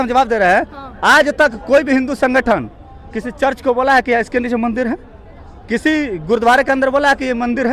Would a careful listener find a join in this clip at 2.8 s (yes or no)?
no